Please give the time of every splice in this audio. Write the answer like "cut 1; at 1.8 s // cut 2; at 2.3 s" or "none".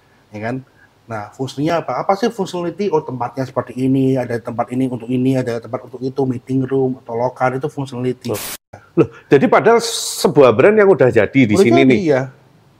cut 1; at 8.5 s